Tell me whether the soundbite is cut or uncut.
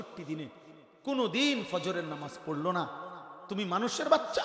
uncut